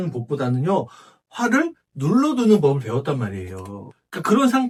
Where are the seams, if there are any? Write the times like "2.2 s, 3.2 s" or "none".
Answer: none